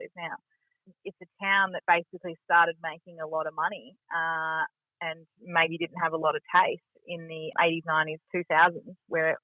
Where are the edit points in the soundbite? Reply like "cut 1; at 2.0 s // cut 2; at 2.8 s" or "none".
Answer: cut 1; at 0.8 s // cut 2; at 7.5 s